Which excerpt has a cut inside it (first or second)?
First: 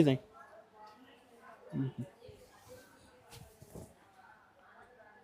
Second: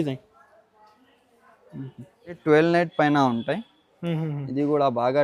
second